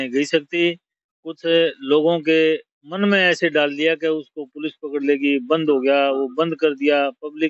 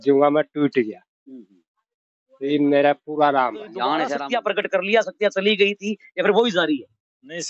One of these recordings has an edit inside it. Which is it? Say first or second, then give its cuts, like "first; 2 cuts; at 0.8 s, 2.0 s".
second; 1 cut; at 4.2 s